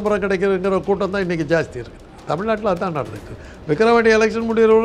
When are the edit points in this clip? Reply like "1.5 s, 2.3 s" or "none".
none